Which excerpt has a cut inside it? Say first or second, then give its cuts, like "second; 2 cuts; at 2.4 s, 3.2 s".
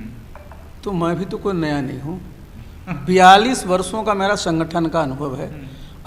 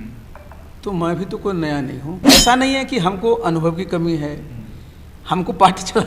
second; 1 cut; at 2.2 s